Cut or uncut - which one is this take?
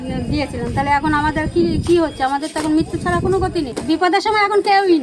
cut